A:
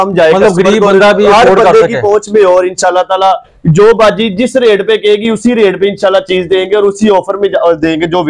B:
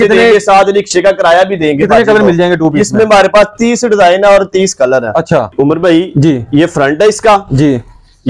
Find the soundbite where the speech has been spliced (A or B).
B